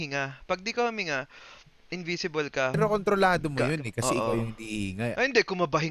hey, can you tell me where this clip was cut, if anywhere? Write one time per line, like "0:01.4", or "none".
0:02.8
0:05.1